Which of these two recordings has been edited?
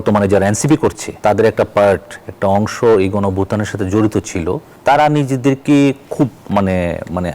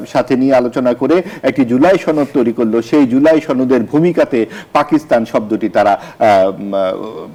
first; 3 cuts; at 1.1 s, 4.7 s, 6.4 s

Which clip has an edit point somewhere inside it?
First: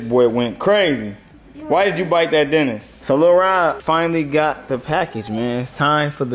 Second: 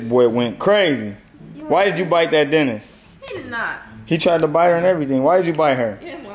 first; 2 cuts; at 2.9 s, 3.8 s

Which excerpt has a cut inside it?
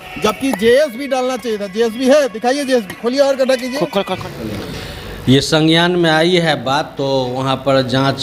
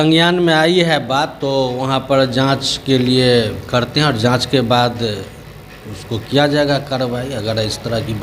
first; 1 cut; at 4.2 s

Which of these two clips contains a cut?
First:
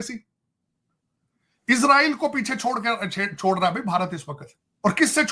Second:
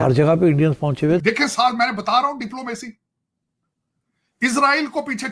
second; 1 cut; at 1.2 s

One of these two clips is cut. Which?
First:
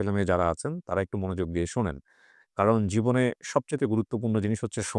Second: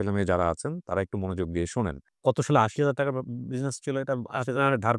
second; 1 cut; at 2.1 s

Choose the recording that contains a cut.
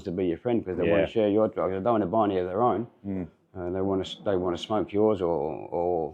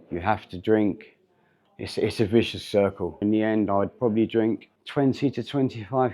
second; 2 cuts; at 3.2 s, 4.8 s

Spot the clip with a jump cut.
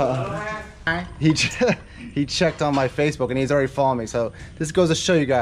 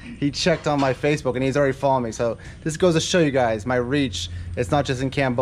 first; 1 cut; at 0.9 s

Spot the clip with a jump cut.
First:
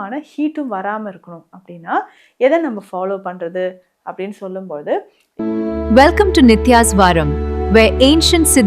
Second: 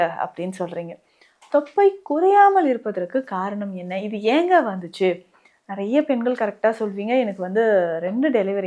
first; 1 cut; at 5.3 s

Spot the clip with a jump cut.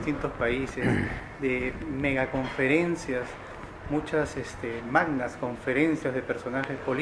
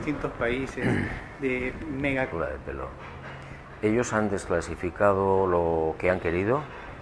first; 1 cut; at 2.3 s

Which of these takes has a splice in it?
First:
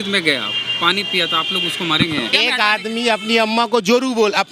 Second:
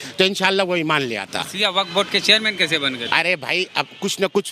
first; 1 cut; at 2.3 s

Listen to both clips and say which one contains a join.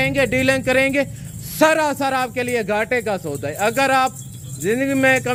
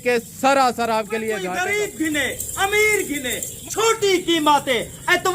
second; 2 cuts; at 1.5 s, 3.5 s

